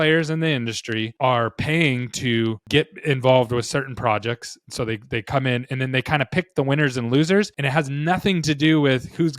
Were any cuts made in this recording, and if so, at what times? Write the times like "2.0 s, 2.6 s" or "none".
1.1 s, 2.6 s, 7.6 s